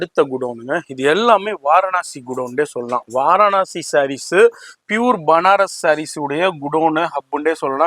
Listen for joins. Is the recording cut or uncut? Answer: uncut